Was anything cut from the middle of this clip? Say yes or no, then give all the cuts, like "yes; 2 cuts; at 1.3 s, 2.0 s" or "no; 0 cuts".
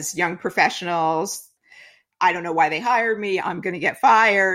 yes; 1 cut; at 1.7 s